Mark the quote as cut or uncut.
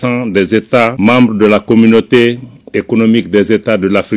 cut